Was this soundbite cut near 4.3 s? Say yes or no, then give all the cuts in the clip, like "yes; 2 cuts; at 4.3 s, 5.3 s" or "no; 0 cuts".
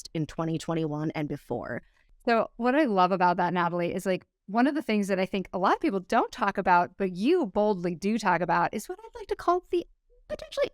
no; 1 cut; at 2.0 s